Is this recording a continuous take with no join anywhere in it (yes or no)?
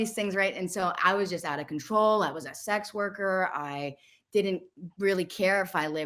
yes